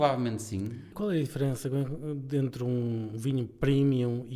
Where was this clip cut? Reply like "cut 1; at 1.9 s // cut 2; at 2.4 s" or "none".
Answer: cut 1; at 0.9 s